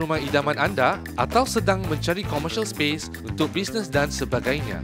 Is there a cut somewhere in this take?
no; 0 cuts

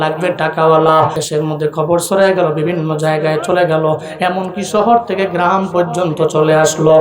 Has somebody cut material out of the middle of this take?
yes; 1 cut; at 1.2 s

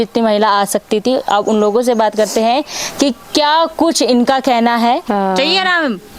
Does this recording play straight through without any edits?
no; 1 cut; at 4.9 s

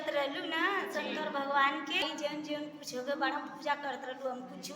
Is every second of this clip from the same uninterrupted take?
no; 1 cut; at 2.0 s

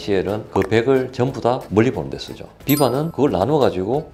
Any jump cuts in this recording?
no; 0 cuts

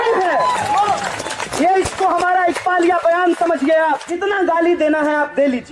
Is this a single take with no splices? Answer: no; 1 cut; at 4.1 s

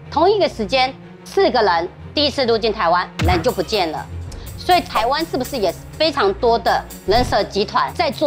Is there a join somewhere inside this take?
no; 0 cuts

